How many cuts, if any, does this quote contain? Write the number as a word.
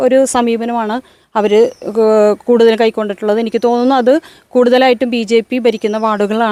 zero